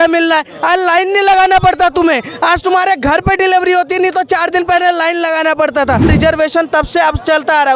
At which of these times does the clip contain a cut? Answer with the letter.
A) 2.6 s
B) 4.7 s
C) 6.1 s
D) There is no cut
C